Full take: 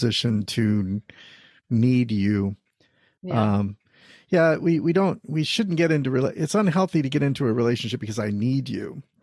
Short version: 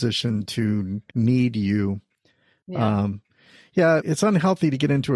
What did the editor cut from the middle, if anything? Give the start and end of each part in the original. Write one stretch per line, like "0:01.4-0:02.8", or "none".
0:01.0-0:01.6
0:04.6-0:06.4